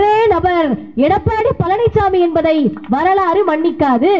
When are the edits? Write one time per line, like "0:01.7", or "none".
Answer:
none